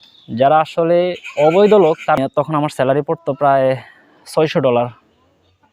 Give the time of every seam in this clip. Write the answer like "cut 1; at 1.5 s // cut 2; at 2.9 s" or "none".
cut 1; at 2.2 s